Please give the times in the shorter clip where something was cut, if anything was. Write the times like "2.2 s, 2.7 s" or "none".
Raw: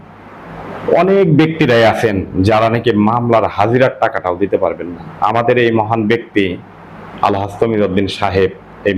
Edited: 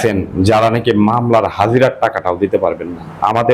none